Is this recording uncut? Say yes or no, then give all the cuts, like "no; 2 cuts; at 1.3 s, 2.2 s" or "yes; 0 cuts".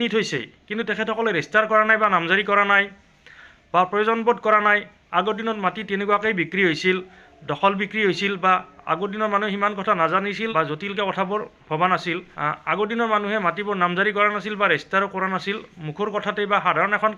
yes; 0 cuts